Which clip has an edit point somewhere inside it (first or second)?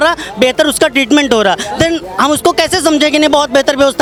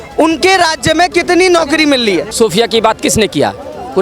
second